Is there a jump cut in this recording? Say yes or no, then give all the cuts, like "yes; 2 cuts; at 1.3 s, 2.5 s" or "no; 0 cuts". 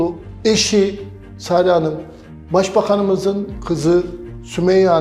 no; 0 cuts